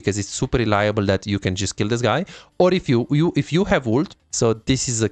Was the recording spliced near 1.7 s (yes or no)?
no